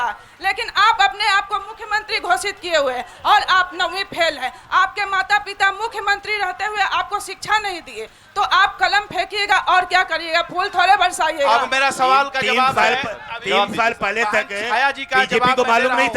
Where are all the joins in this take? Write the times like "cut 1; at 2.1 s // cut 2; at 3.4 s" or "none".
none